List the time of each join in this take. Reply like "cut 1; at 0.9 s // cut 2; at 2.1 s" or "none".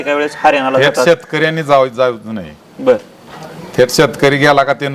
none